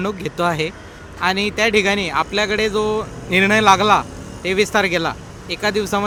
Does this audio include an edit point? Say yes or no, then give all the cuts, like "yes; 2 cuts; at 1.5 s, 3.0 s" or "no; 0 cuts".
no; 0 cuts